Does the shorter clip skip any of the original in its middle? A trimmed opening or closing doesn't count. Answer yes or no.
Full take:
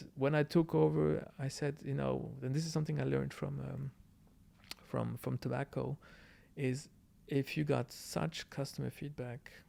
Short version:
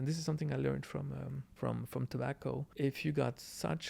yes